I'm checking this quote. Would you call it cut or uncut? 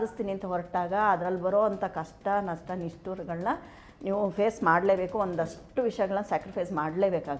uncut